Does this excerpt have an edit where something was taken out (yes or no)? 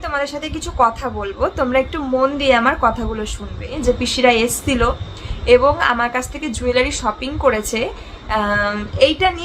yes